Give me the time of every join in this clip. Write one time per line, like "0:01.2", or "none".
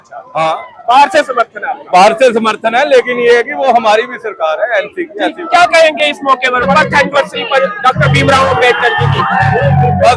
none